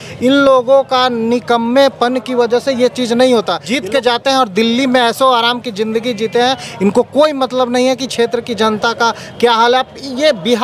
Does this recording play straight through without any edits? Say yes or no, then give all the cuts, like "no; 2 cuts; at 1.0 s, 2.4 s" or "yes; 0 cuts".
no; 1 cut; at 3.6 s